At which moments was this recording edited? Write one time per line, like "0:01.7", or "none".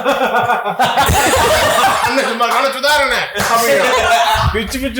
none